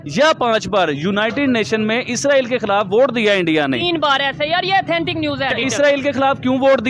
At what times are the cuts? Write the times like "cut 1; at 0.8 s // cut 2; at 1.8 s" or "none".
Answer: cut 1; at 5.5 s